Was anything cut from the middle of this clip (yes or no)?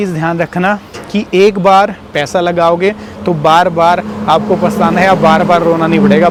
no